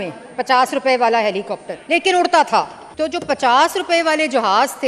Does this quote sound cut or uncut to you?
cut